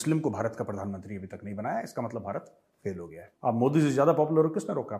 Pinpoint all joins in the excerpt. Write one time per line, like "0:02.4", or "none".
0:03.2